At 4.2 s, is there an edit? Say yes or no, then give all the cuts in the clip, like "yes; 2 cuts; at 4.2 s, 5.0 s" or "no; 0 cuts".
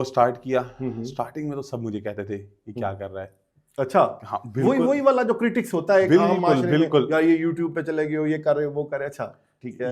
no; 0 cuts